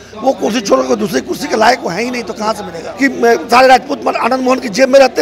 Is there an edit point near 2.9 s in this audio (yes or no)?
yes